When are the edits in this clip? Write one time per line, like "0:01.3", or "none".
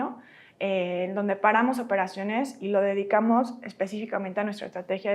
none

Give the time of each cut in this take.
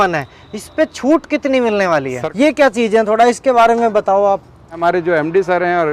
0:02.2
0:04.8

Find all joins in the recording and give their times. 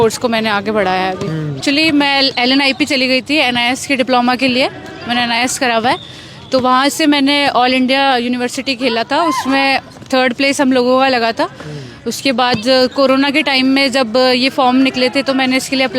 0:01.6

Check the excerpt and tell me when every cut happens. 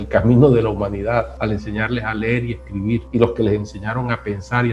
0:01.3
0:03.1

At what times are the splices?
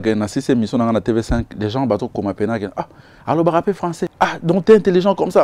0:04.0

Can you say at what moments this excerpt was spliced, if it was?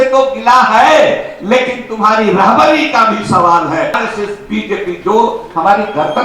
0:04.0

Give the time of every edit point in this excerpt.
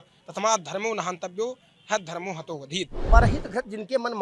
0:03.0

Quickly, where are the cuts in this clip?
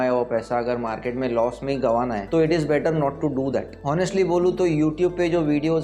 0:02.2
0:03.7

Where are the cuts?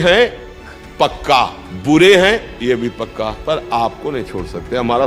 0:01.7
0:03.4

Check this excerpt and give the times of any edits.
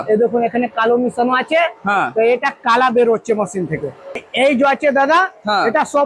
0:04.2

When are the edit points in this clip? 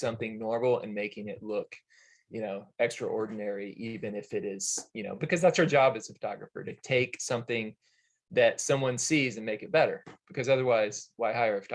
none

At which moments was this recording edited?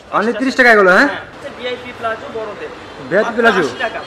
0:01.3

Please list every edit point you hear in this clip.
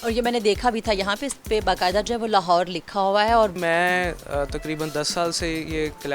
0:03.6

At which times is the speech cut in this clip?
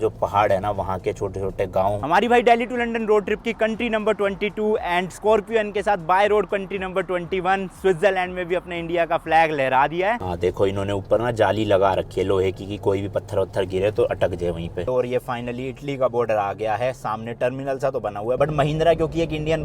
0:02.0
0:10.2
0:14.9
0:18.4

